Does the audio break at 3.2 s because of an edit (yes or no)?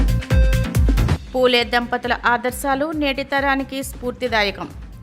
no